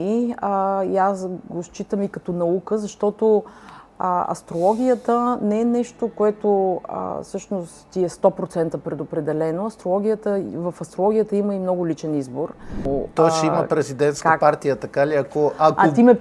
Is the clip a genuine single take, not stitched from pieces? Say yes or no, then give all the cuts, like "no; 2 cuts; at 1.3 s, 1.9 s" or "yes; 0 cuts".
no; 1 cut; at 12.9 s